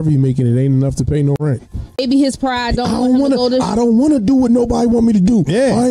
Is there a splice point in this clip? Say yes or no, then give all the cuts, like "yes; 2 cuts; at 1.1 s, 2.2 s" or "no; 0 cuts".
yes; 1 cut; at 2.0 s